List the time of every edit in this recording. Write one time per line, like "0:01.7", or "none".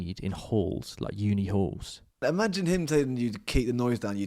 0:02.2